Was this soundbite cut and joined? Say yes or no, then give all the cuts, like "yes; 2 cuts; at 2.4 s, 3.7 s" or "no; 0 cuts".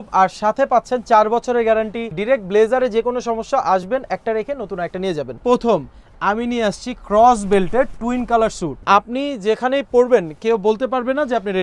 yes; 3 cuts; at 2.1 s, 5.4 s, 8.8 s